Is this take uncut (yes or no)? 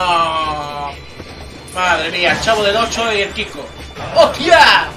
yes